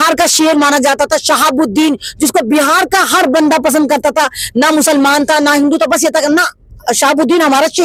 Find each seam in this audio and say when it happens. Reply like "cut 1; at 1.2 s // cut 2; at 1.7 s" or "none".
none